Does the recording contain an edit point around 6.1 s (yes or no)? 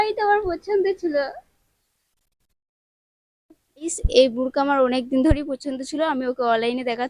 no